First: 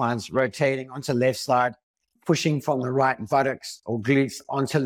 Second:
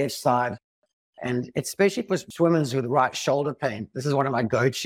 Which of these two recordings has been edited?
second; 1 cut; at 2.3 s

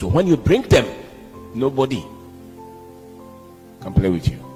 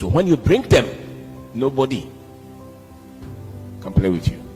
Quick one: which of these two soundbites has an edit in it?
second; 2 cuts; at 2.2 s, 3.8 s

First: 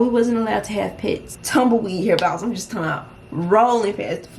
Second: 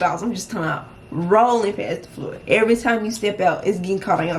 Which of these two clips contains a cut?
first; 1 cut; at 1.3 s

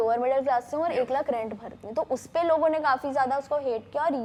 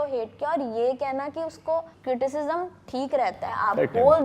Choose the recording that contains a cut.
second; 1 cut; at 1.9 s

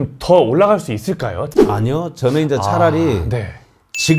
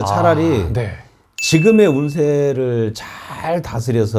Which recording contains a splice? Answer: first; 1 cut; at 1.4 s

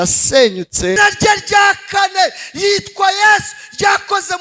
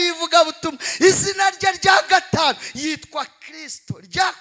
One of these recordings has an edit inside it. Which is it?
first; 1 cut; at 1.0 s

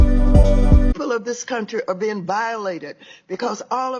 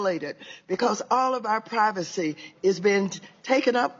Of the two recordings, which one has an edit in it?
first; 1 cut; at 1.0 s

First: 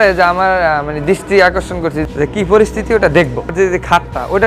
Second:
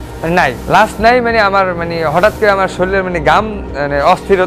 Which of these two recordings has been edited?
first; 2 cuts; at 2.0 s, 3.5 s

